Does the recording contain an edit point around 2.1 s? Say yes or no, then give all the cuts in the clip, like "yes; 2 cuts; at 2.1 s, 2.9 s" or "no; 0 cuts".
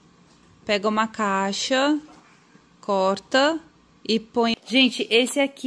no; 1 cut; at 4.6 s